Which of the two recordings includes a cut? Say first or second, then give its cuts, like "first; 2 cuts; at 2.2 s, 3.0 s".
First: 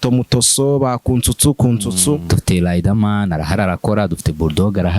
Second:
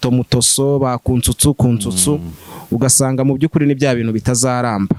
first; 1 cut; at 2.3 s